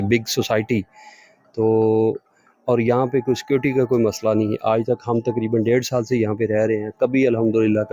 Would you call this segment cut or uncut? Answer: uncut